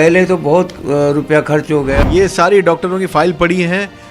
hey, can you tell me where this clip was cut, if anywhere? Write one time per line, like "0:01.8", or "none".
0:02.0